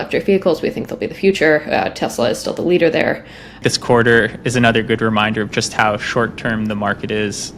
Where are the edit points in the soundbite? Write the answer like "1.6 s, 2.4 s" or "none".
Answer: 3.6 s